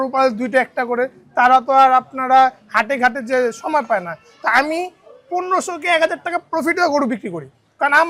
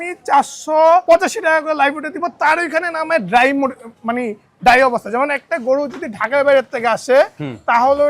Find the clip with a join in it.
second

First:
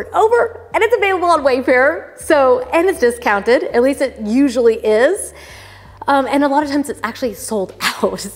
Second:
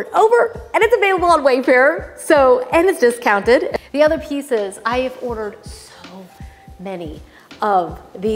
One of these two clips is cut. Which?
second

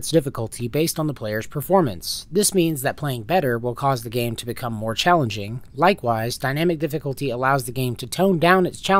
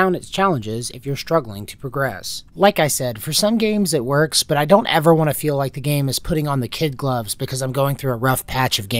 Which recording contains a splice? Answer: second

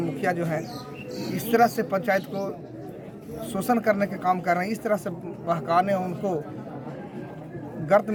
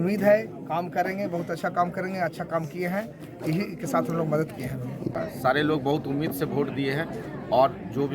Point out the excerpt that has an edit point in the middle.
second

